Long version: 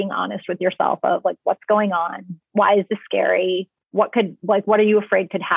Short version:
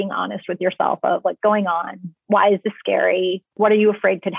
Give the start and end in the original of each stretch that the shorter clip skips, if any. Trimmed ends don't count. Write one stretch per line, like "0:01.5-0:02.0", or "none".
0:01.4-0:01.6
0:03.8-0:04.6